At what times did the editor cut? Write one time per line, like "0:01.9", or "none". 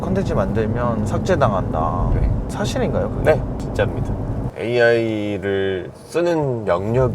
0:04.5